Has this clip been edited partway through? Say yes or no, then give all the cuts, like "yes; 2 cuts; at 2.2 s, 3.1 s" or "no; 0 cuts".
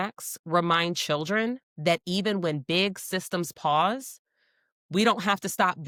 no; 0 cuts